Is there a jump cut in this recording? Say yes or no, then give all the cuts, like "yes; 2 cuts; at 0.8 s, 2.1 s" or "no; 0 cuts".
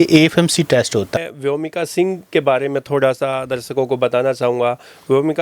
yes; 1 cut; at 1.2 s